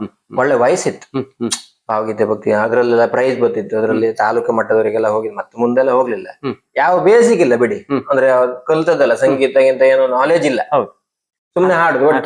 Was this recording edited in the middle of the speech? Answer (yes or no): no